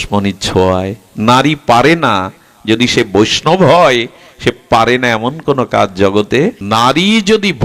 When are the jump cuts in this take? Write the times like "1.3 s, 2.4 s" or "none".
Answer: 6.6 s